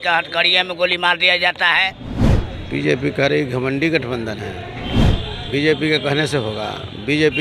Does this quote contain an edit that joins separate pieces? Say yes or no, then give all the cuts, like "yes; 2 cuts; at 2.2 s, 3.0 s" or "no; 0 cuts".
yes; 1 cut; at 2.2 s